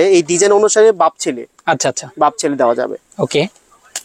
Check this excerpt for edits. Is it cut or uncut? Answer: uncut